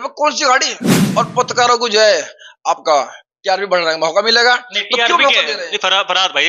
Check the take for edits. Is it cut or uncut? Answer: cut